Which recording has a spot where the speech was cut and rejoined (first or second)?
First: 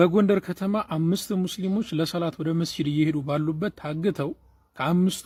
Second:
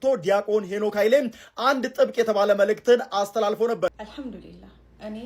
second